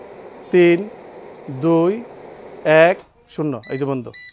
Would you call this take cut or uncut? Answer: uncut